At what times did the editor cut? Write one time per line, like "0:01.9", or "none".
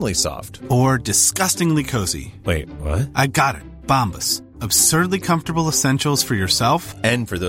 none